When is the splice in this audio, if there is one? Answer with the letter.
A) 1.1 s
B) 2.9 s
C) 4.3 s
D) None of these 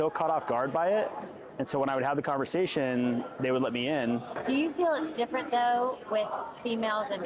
C